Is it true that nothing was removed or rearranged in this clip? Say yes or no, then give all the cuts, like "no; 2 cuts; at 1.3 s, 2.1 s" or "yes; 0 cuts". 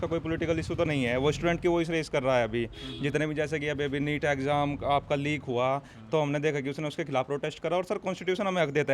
yes; 0 cuts